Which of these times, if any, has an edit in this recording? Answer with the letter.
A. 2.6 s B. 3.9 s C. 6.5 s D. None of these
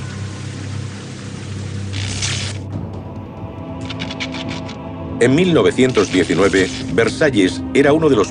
D